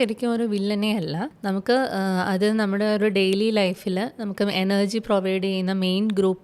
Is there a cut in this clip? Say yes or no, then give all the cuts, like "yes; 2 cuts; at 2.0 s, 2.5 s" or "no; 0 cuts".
yes; 1 cut; at 1.3 s